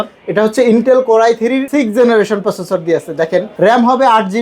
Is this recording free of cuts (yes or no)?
no